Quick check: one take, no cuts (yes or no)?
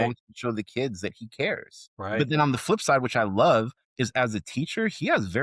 no